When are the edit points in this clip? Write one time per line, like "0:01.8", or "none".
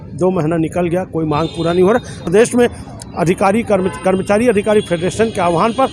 0:02.2